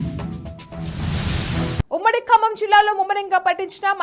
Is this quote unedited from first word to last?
no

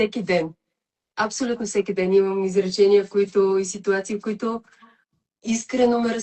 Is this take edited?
no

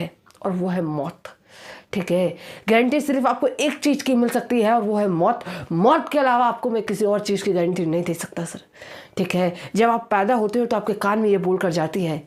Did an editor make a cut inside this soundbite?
no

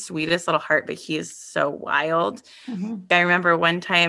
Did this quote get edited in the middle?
yes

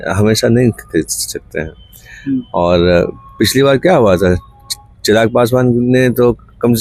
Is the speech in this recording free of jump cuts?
yes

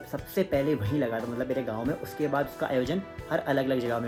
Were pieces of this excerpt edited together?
no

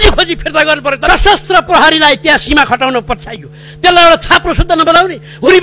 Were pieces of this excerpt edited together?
yes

